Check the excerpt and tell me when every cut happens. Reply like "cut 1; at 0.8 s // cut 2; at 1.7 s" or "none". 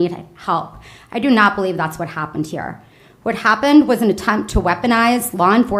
none